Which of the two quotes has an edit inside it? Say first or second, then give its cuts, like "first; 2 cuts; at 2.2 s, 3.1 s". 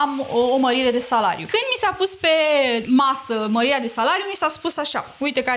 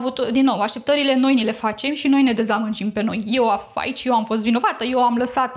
first; 2 cuts; at 1.4 s, 2.8 s